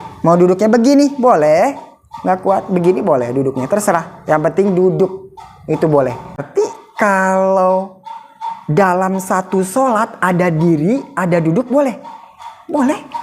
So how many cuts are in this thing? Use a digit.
1